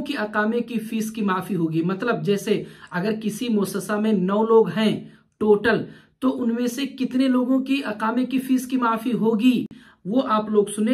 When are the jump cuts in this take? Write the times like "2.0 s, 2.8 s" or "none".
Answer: none